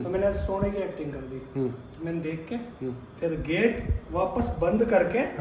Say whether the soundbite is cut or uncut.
uncut